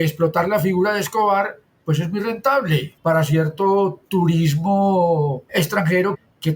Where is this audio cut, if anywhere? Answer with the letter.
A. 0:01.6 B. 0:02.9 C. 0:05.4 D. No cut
C